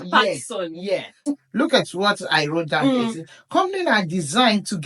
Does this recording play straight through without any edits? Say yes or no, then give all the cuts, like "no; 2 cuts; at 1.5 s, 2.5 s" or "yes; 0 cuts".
no; 1 cut; at 1.2 s